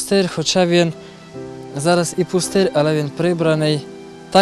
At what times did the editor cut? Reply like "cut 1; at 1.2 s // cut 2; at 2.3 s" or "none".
none